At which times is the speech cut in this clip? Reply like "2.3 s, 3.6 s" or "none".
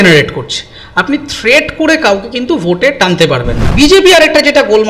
3.6 s